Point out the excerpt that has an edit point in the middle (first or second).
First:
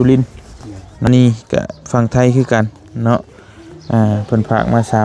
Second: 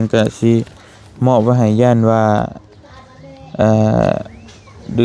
first